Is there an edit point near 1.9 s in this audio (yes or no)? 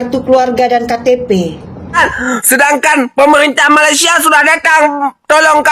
yes